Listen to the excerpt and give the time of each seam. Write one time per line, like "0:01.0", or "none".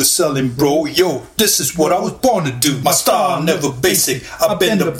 0:02.8